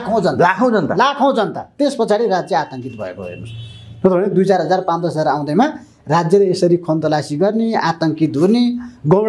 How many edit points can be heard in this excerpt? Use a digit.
0